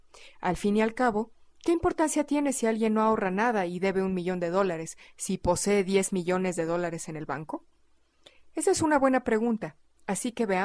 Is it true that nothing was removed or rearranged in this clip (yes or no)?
no